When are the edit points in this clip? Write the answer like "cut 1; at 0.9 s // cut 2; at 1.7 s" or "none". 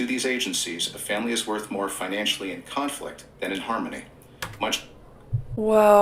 none